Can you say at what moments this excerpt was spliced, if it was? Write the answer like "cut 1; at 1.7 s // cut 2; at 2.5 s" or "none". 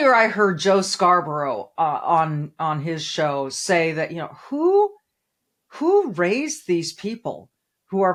none